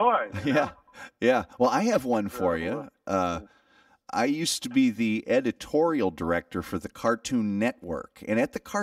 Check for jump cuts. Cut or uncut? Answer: uncut